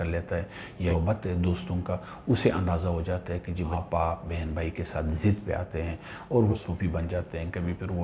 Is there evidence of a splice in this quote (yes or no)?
yes